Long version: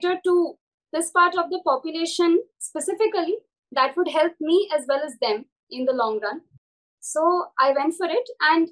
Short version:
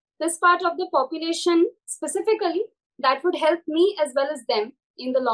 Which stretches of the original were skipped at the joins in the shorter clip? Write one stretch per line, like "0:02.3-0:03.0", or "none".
none